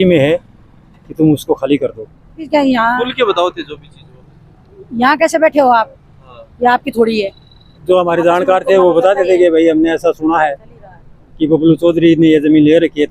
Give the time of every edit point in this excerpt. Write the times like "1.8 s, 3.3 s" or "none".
2.5 s, 7.7 s